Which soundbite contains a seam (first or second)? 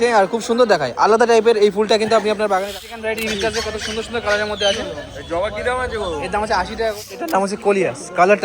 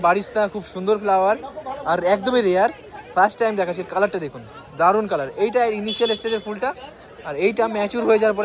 first